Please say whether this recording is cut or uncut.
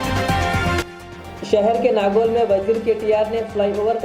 uncut